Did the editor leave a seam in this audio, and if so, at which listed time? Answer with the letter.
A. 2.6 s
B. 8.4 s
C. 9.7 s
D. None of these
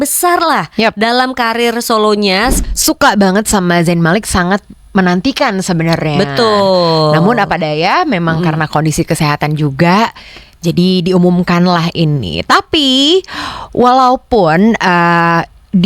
A